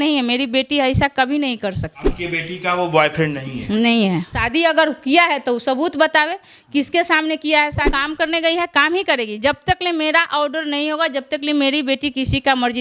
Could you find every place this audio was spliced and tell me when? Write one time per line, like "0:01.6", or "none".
0:02.2
0:04.5
0:08.0